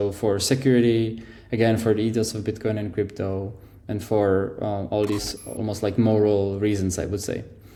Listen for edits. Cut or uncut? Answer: uncut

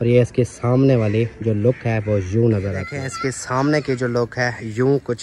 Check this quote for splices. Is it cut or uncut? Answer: cut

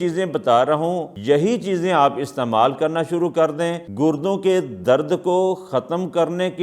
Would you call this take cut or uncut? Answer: cut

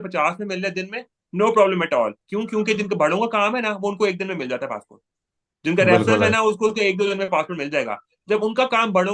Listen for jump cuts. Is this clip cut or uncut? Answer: uncut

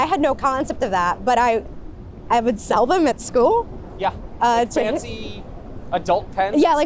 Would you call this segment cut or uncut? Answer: uncut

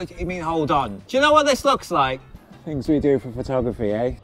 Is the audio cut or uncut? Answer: cut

